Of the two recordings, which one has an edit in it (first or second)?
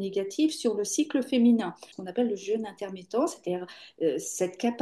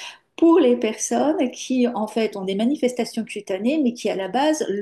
first